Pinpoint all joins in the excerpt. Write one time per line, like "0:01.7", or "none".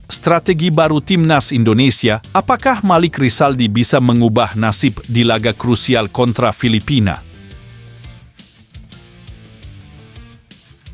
0:07.2